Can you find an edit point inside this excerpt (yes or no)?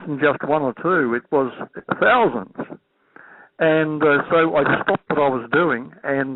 no